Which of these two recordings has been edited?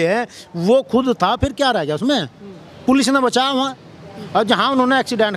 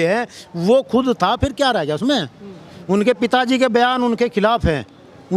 second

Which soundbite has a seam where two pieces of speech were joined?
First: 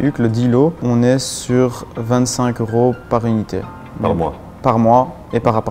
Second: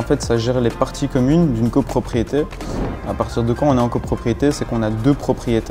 first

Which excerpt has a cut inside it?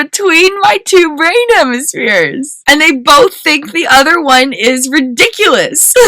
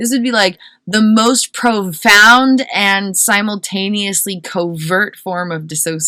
first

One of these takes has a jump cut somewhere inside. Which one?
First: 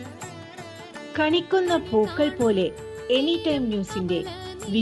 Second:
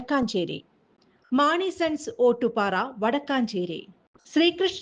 first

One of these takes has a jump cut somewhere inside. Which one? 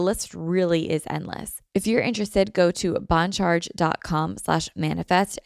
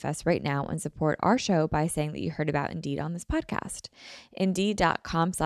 first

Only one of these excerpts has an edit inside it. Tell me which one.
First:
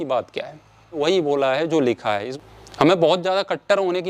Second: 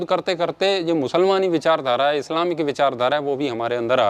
first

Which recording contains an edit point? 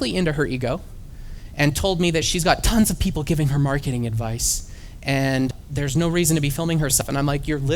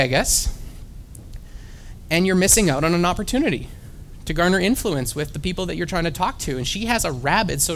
first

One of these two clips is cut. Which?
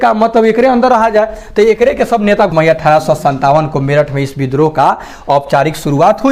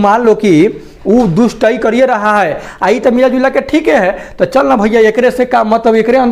first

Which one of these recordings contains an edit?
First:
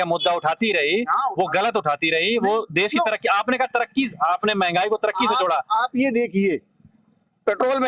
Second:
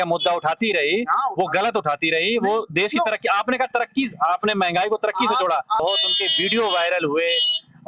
second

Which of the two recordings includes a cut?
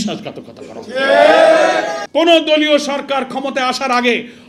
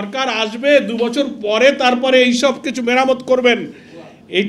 first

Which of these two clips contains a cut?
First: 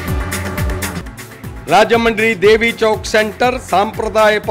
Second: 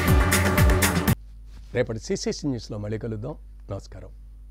first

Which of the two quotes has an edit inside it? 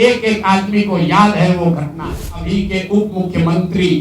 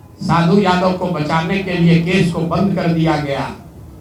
first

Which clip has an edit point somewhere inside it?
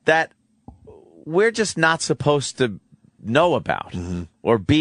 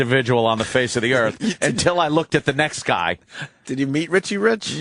second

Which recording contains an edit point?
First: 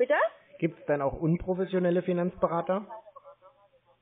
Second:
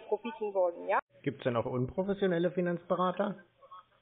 second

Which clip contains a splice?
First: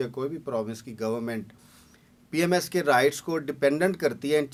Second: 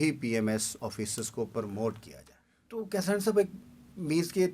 second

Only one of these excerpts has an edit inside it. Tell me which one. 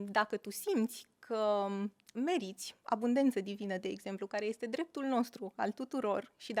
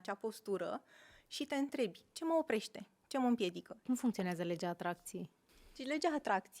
second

